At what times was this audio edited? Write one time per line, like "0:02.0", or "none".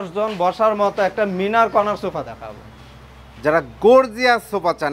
none